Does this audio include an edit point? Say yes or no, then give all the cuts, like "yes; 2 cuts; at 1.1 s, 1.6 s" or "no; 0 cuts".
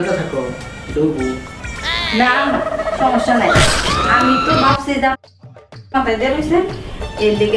no; 0 cuts